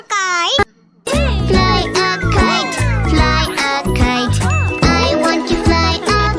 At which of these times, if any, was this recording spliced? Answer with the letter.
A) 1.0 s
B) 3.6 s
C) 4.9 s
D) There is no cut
A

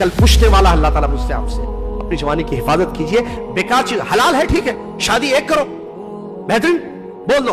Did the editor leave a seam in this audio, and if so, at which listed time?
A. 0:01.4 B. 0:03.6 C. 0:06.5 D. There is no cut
D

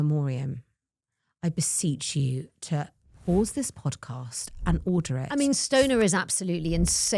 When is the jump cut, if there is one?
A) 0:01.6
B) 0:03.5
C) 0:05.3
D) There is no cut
C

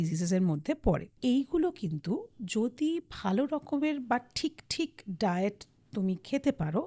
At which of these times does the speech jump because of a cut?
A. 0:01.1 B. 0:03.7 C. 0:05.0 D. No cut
A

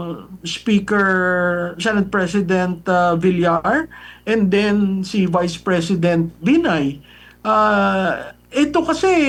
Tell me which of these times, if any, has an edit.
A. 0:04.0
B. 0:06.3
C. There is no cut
C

